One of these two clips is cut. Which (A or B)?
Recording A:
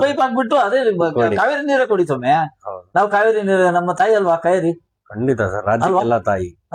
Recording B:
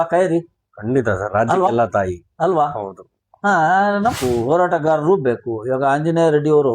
B